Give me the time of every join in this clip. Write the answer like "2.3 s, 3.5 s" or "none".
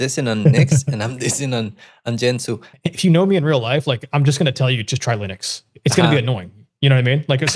2.7 s